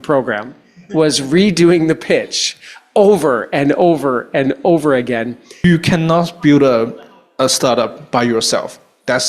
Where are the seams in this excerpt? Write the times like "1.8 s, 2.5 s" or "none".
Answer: 5.6 s